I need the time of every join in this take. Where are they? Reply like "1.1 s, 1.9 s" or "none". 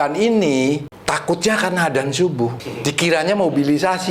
0.9 s, 2.7 s